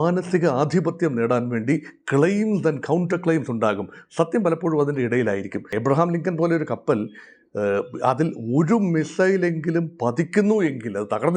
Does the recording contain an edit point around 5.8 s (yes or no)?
yes